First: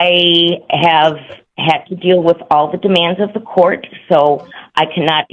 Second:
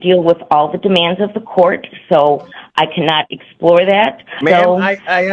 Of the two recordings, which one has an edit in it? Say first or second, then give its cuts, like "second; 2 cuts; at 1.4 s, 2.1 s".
second; 1 cut; at 4.4 s